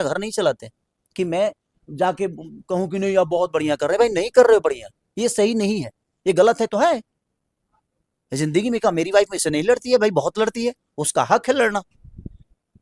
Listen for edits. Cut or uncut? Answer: uncut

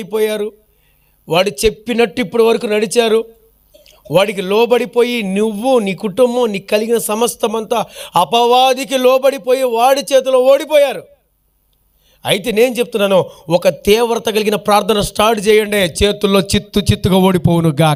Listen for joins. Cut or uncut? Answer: uncut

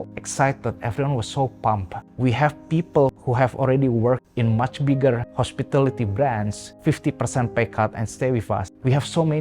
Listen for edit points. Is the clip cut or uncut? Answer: cut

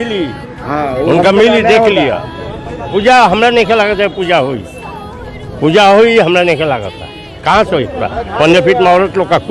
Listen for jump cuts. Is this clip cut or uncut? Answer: cut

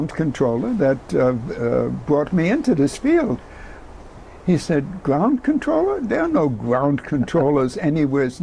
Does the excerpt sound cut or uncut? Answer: uncut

